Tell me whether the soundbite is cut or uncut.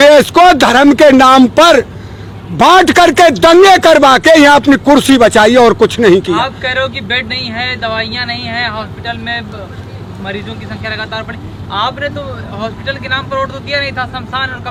uncut